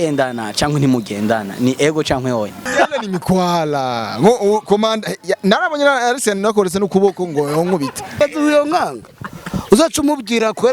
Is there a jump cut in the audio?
yes; 1 cut; at 2.6 s

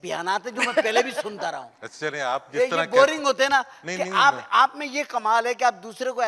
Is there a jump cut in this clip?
no; 0 cuts

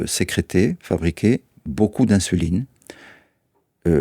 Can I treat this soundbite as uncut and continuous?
yes; 0 cuts

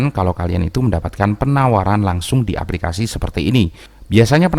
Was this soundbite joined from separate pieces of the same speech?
no; 0 cuts

